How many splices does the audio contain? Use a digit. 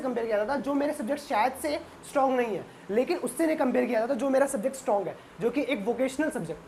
0